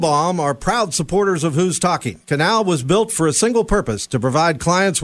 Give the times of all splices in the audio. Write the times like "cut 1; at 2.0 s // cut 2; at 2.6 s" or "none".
none